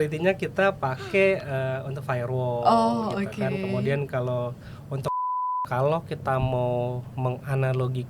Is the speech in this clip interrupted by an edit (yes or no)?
yes